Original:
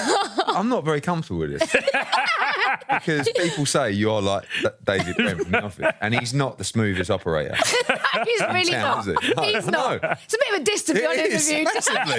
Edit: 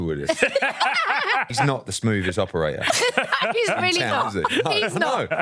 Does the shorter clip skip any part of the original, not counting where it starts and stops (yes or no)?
yes